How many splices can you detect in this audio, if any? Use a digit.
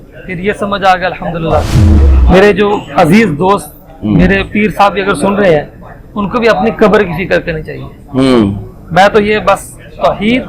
1